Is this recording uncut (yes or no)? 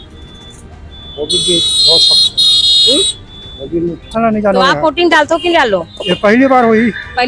no